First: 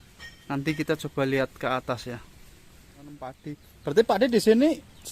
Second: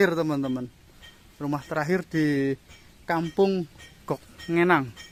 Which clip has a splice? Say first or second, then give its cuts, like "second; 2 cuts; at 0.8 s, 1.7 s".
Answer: first; 1 cut; at 3.4 s